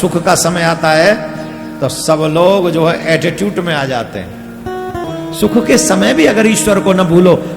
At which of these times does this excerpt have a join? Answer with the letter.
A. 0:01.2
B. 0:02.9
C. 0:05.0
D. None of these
C